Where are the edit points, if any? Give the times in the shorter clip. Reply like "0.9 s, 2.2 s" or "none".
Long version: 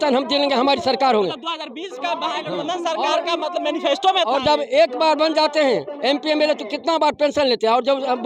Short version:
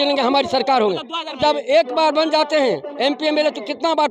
1.4 s